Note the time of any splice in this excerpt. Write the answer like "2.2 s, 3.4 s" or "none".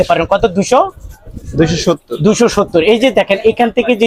none

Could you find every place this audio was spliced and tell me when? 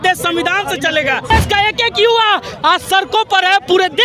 1.3 s

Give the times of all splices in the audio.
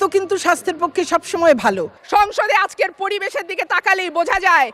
1.9 s

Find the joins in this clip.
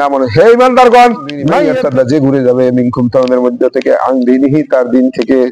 1.5 s

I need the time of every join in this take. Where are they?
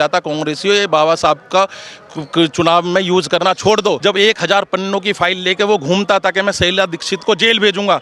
4.0 s

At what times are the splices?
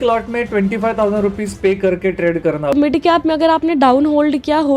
2.7 s

